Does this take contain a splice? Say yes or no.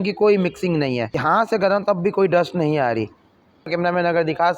yes